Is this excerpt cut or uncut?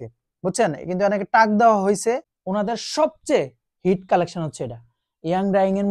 cut